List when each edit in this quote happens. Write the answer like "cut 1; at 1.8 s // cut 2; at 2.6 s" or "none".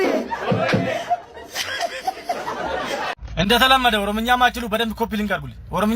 cut 1; at 3.2 s